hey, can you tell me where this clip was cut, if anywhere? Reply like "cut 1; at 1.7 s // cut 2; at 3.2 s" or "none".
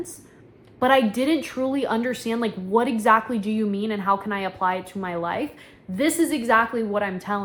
none